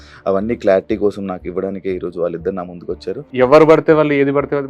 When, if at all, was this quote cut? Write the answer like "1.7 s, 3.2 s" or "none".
3.2 s